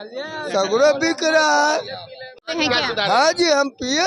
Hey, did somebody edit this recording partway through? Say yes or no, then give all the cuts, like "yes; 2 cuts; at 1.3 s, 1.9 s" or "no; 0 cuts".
no; 0 cuts